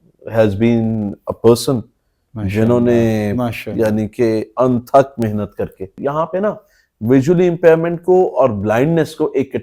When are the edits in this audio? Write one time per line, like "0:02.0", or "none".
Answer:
0:06.0